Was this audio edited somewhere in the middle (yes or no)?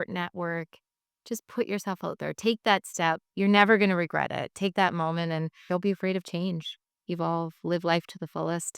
yes